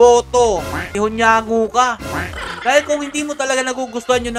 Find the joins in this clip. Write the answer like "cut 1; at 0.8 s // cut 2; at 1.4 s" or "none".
cut 1; at 0.9 s